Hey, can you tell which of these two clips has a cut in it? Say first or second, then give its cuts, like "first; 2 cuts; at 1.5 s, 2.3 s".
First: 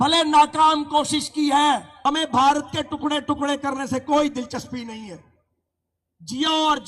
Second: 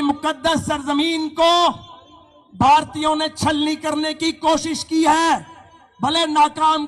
first; 1 cut; at 1.9 s